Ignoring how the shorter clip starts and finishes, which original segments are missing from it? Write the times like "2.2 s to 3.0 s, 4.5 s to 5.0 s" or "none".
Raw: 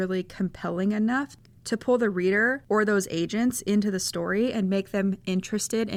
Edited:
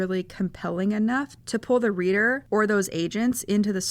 1.4 s to 1.5 s

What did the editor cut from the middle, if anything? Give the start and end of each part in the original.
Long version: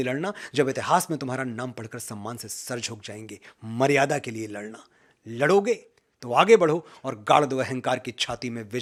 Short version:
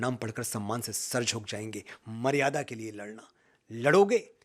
none

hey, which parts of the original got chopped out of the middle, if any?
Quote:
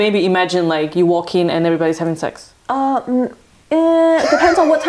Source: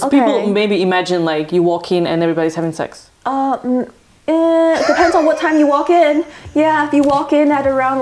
none

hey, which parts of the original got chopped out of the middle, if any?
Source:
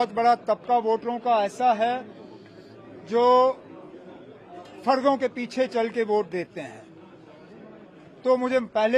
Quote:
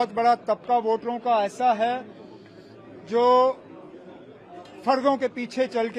none

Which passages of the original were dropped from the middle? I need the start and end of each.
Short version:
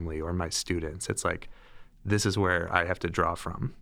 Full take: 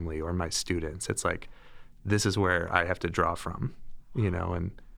none

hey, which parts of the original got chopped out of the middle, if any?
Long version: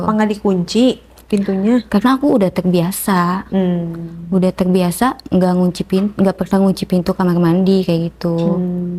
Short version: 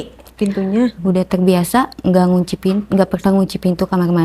1.9 s to 4.2 s

